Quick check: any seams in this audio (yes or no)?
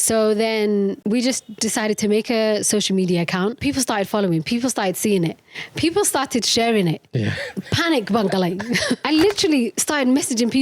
yes